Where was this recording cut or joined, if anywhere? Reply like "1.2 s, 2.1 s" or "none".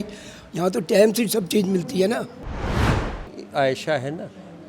2.9 s